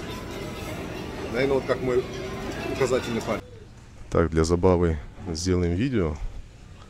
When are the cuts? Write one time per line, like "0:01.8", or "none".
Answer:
0:03.5